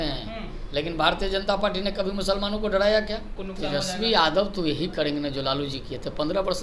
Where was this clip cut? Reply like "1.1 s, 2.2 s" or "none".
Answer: 3.4 s